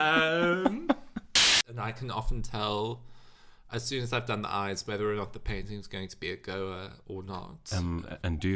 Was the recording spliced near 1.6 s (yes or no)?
yes